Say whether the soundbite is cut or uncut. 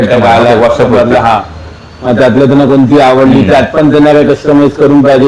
uncut